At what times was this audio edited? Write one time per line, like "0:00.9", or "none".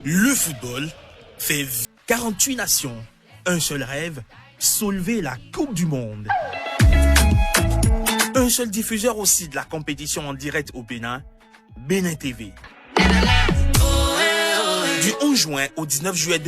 0:01.8